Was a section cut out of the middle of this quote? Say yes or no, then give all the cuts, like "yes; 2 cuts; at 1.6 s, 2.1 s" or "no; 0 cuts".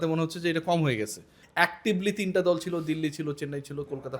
yes; 1 cut; at 1.4 s